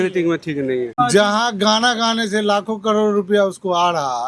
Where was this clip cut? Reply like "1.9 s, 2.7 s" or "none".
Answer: 0.9 s